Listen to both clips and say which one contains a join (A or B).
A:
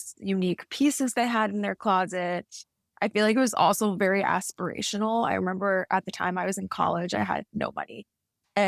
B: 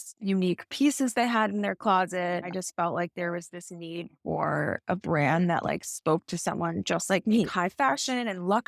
B